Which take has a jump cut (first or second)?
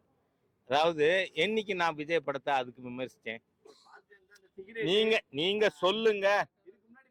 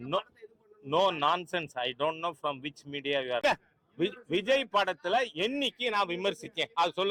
second